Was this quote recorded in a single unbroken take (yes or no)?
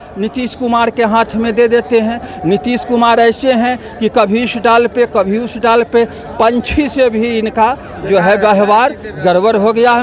yes